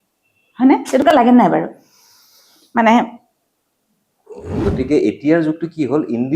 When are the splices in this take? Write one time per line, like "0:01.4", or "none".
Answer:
0:04.6